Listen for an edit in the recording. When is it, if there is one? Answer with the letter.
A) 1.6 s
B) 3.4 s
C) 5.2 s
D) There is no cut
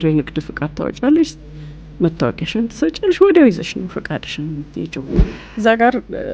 C